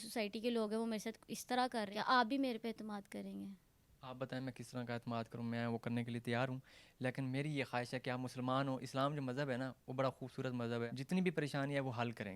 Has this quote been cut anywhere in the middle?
yes; 2 cuts; at 1.9 s, 10.9 s

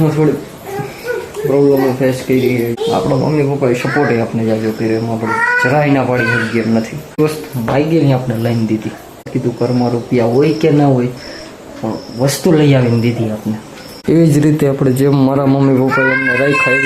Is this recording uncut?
no; 4 cuts; at 2.7 s, 7.2 s, 9.3 s, 14.0 s

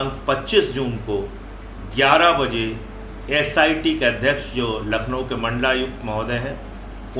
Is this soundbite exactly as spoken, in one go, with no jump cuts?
yes; 0 cuts

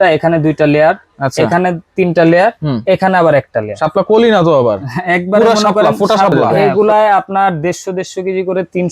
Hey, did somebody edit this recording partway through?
yes; 1 cut; at 6.4 s

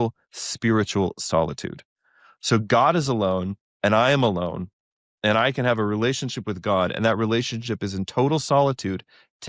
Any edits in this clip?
no; 0 cuts

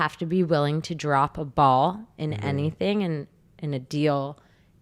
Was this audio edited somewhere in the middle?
no; 0 cuts

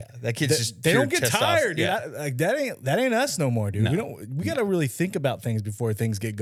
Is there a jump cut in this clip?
no; 0 cuts

